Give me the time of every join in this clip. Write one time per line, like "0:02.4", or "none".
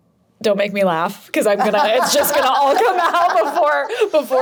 none

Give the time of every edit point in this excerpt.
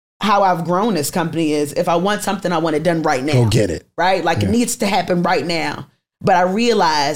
none

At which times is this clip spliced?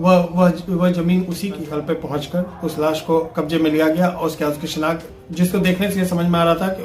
0:01.6

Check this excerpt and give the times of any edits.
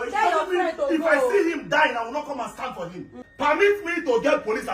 0:03.2

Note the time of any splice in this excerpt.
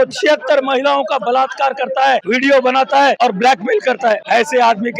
0:02.2
0:03.2
0:04.2

